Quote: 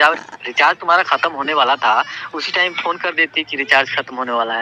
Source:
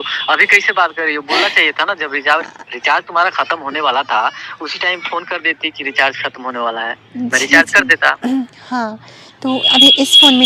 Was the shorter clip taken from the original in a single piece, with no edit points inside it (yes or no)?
yes